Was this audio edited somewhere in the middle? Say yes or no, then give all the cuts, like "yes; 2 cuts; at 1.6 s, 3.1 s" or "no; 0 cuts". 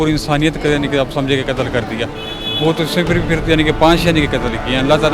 no; 0 cuts